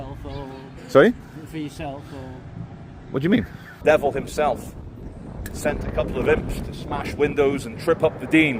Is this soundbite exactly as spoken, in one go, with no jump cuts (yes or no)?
no